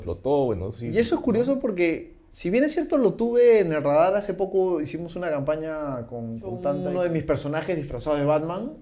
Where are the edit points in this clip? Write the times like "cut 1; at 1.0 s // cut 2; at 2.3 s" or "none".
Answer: cut 1; at 6.8 s